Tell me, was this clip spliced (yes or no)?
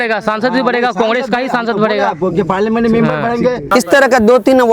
yes